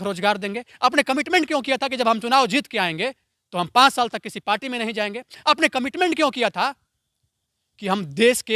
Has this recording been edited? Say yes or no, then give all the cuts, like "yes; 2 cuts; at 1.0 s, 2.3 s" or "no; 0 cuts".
no; 0 cuts